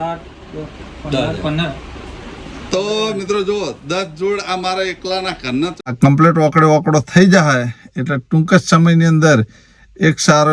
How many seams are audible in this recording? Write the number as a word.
one